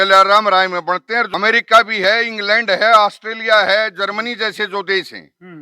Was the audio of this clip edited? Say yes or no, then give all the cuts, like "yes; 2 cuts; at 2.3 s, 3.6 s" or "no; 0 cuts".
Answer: yes; 1 cut; at 1.3 s